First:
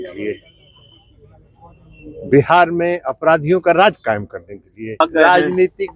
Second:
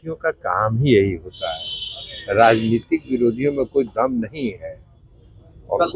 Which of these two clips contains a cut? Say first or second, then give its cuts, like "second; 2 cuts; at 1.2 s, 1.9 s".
first; 1 cut; at 4.9 s